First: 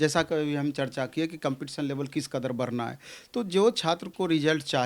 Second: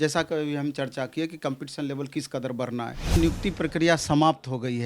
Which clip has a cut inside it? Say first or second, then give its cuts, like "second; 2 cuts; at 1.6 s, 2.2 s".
second; 1 cut; at 3.1 s